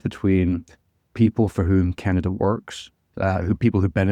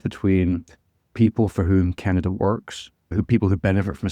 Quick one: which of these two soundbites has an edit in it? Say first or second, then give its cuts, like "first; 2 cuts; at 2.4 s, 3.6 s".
second; 1 cut; at 3.1 s